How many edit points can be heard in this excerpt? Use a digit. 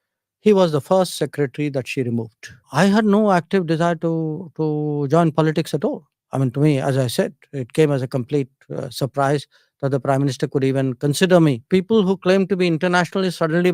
2